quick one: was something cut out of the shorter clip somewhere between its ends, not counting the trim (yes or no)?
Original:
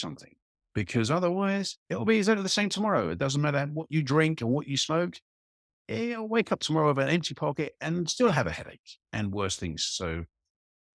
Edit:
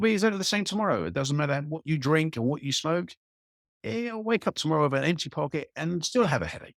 no